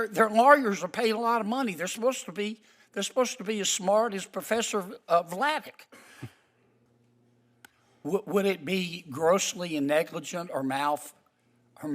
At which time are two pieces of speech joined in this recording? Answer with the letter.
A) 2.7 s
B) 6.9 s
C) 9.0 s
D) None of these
B